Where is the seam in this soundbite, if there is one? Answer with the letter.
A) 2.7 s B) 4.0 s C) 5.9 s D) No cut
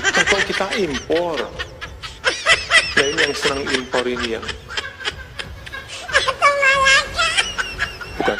D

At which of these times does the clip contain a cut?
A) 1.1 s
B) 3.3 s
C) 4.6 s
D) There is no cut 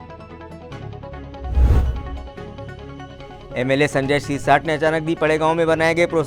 B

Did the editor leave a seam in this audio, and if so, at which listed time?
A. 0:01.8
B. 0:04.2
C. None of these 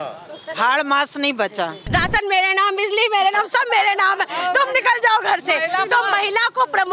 A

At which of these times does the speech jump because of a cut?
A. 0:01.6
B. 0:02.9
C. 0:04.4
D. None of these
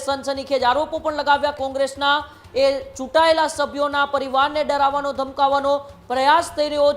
A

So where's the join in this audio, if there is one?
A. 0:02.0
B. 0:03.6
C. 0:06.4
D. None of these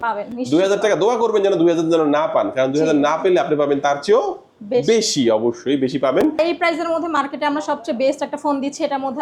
C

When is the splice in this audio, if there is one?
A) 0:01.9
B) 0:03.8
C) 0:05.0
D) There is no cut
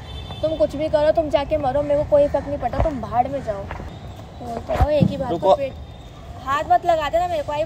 B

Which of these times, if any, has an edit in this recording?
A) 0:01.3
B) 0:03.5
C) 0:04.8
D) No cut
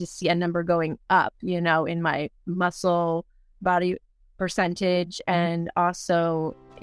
B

